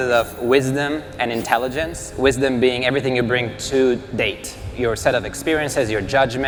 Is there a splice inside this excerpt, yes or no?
no